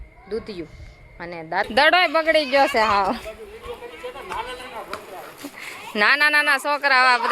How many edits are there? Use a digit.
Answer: 1